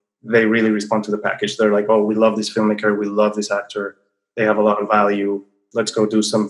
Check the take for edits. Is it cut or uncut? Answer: cut